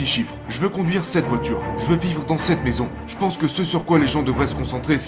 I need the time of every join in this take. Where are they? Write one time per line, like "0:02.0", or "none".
0:03.0